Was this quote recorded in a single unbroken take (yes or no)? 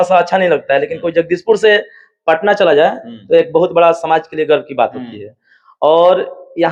yes